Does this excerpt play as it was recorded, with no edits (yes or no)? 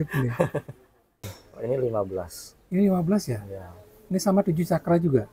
no